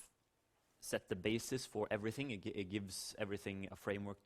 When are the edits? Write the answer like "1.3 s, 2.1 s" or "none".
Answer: 2.3 s